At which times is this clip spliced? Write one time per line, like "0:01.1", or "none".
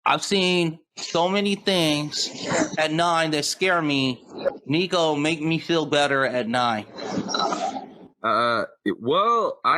0:05.2